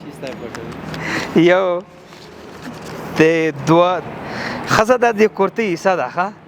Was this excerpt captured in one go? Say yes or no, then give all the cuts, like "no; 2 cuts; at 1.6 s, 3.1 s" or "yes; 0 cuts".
no; 1 cut; at 4.0 s